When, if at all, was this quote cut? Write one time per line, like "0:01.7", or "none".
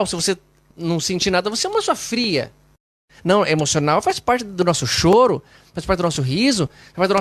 0:02.9